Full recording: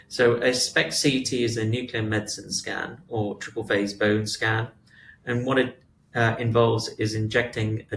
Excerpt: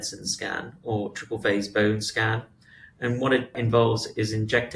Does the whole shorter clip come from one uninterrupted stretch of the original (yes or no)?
no